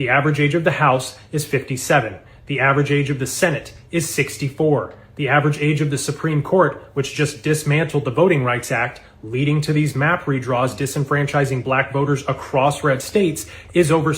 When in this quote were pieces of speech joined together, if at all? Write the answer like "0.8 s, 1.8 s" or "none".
5.4 s, 11.5 s